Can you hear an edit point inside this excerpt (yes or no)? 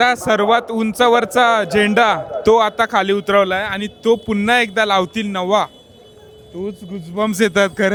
no